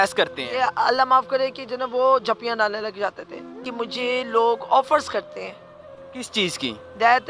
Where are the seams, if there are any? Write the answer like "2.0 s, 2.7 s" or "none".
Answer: 3.6 s